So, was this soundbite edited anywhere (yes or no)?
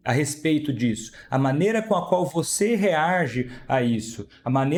no